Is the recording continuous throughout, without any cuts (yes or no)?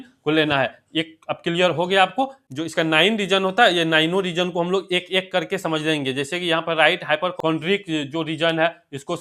no